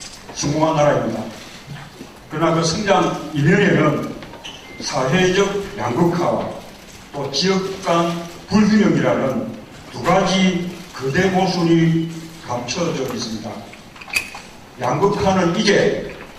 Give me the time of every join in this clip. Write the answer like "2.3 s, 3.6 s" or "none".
15.4 s